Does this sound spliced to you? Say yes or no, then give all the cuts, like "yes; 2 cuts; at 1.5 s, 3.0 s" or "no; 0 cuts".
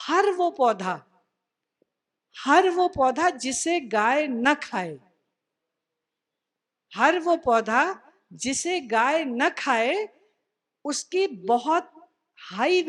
no; 0 cuts